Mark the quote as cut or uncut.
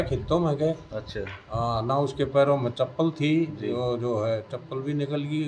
uncut